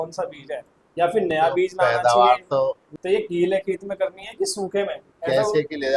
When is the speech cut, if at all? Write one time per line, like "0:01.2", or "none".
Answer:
0:02.9